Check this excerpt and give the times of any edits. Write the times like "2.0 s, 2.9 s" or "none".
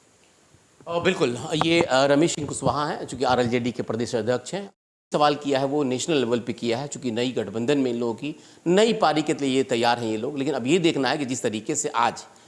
none